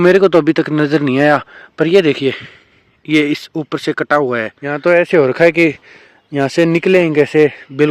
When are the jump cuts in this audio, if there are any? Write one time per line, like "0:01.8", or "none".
0:04.6